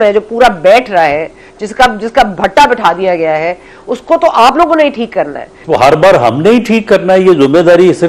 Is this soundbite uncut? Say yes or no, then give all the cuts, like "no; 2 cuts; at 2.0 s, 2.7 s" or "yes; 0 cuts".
no; 1 cut; at 5.5 s